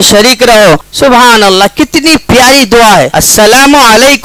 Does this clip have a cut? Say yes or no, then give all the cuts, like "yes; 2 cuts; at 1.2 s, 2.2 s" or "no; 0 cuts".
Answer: yes; 2 cuts; at 0.9 s, 3.2 s